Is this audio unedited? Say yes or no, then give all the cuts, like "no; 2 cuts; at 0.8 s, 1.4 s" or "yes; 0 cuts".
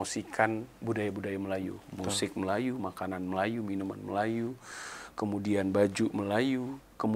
yes; 0 cuts